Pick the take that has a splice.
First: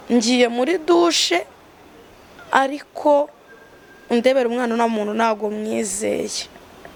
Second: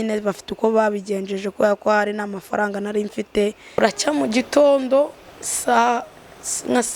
second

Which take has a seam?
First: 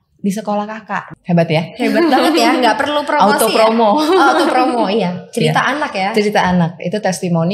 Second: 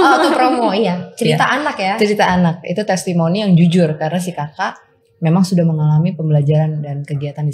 first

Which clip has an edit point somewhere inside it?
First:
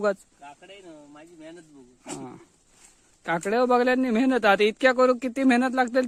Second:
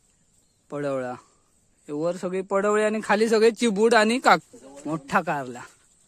second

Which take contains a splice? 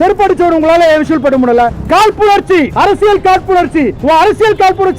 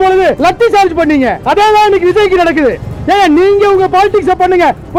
first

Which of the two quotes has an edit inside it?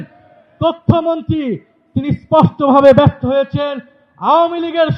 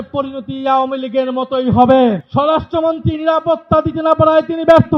second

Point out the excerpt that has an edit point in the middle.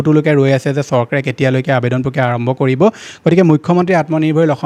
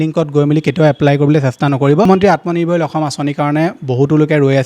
second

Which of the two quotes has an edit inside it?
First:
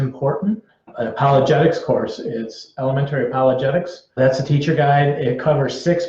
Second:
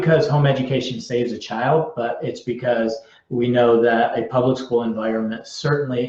first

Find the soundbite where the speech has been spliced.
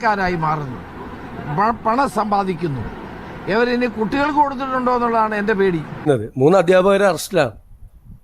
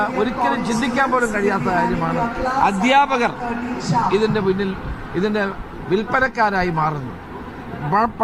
first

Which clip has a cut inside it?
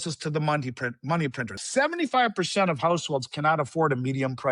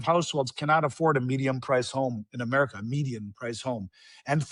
first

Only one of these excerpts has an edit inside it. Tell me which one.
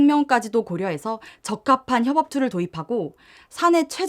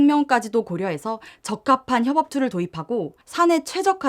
second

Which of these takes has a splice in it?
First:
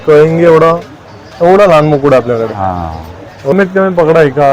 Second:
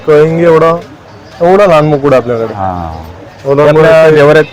first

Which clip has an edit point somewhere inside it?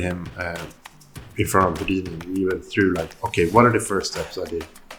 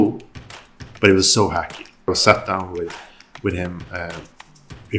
second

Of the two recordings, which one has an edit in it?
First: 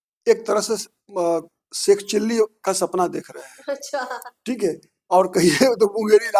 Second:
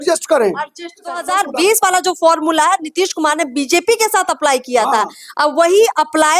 second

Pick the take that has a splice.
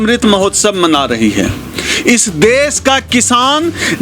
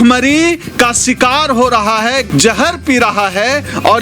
second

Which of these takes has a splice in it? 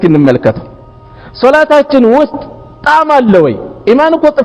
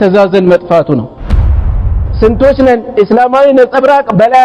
second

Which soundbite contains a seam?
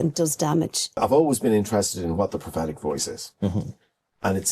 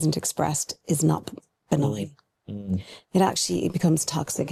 first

